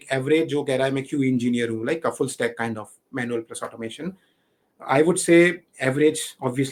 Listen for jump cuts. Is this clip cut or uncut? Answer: uncut